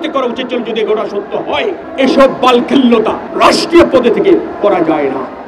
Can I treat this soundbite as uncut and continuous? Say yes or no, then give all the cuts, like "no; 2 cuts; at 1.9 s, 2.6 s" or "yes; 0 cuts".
no; 2 cuts; at 1.9 s, 3.2 s